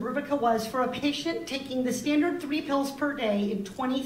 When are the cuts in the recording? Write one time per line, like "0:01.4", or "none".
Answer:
0:02.4